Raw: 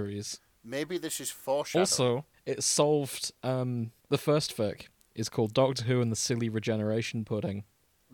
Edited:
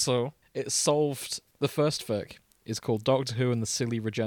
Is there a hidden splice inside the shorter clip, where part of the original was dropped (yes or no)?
yes